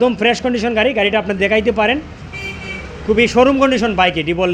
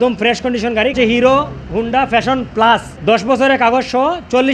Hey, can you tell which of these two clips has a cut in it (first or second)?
second